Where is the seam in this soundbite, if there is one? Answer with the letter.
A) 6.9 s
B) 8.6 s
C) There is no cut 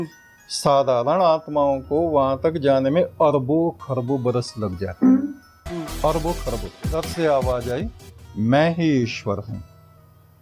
A